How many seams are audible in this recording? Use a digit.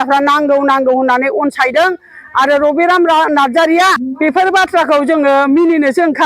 1